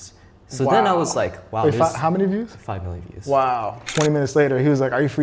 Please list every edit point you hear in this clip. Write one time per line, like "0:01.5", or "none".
0:03.9

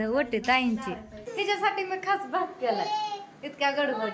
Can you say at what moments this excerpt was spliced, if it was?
0:01.2

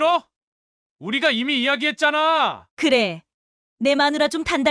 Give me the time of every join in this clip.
0:02.7

